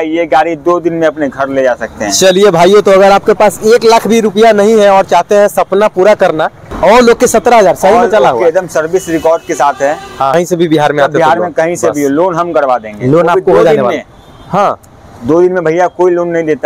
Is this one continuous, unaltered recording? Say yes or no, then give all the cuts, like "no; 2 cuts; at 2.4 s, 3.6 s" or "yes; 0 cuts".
no; 2 cuts; at 6.6 s, 10.3 s